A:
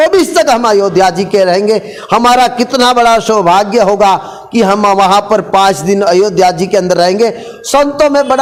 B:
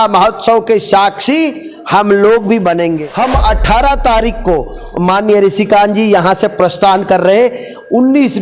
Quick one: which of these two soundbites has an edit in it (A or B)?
B